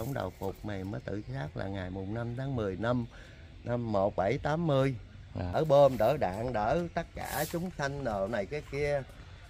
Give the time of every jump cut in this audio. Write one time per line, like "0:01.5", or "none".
0:05.5